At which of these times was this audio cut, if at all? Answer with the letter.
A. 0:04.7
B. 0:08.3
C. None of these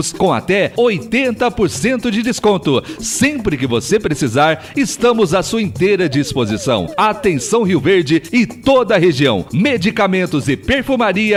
C